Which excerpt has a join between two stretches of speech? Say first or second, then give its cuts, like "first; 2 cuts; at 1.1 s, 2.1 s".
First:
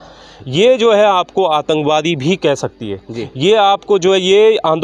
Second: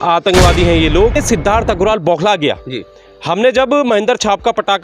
second; 1 cut; at 1.2 s